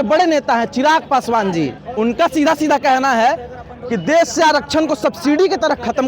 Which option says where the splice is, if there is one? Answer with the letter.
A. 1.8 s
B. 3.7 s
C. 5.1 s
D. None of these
A